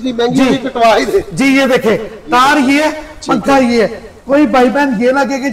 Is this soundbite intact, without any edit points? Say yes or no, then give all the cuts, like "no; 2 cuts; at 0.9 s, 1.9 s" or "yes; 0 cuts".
yes; 0 cuts